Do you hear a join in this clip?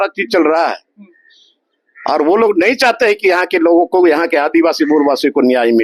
no; 0 cuts

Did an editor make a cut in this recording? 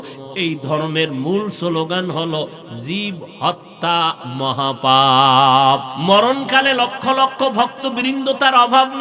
yes; 1 cut; at 5.9 s

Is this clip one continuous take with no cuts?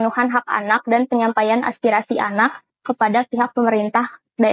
yes; 0 cuts

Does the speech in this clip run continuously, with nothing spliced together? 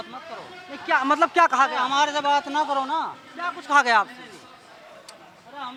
yes; 0 cuts

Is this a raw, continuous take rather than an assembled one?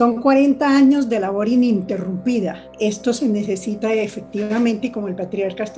no; 1 cut; at 2.7 s

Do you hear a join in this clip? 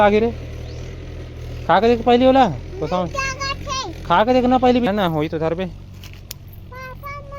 yes; 1 cut; at 4.9 s

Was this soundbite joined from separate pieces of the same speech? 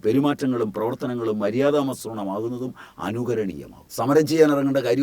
yes; 1 cut; at 3.8 s

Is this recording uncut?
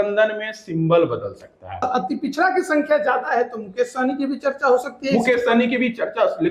no; 1 cut; at 1.8 s

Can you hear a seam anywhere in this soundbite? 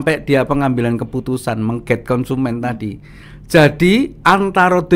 no; 0 cuts

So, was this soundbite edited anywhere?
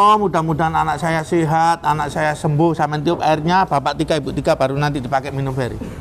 no; 0 cuts

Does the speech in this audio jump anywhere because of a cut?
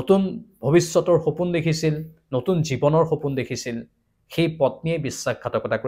no; 0 cuts

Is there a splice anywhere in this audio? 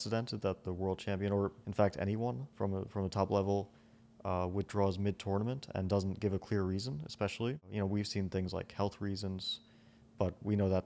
yes; 3 cuts; at 1.6 s, 2.5 s, 7.7 s

